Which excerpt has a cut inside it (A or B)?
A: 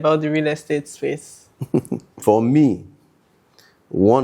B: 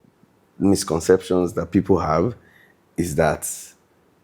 A